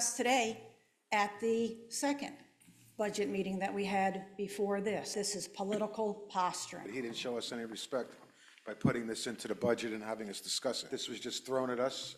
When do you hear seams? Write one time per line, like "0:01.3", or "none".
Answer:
0:05.1
0:06.9
0:10.9